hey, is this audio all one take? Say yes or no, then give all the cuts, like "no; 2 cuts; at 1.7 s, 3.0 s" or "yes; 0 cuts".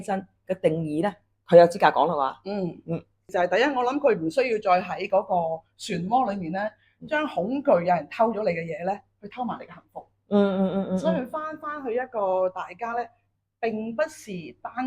no; 1 cut; at 3.3 s